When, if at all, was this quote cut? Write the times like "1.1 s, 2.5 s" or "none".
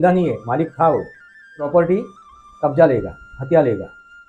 1.6 s